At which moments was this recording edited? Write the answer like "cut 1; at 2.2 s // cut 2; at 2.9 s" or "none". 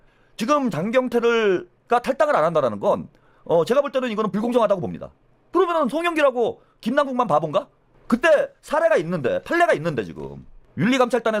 none